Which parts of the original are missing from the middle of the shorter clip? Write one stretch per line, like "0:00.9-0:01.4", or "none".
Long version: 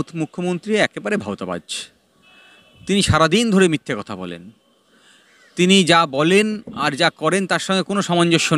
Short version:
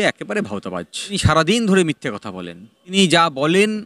0:01.9-0:03.0
0:04.8-0:05.7